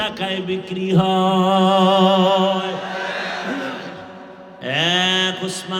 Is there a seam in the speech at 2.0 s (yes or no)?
no